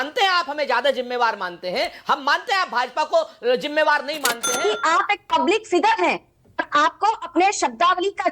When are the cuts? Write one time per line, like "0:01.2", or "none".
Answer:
0:04.5